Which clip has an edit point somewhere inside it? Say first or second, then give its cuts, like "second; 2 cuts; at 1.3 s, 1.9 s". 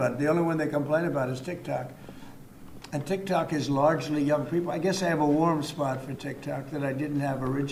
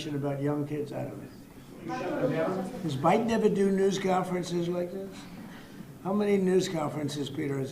second; 1 cut; at 1.9 s